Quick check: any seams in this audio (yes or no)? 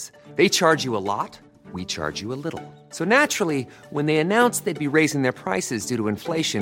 no